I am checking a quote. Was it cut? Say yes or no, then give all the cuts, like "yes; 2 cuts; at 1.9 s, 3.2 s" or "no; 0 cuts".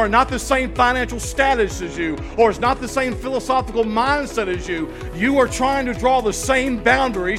no; 0 cuts